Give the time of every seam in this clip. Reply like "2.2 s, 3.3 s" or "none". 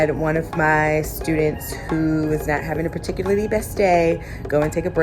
none